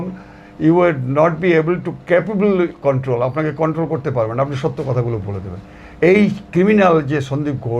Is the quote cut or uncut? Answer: uncut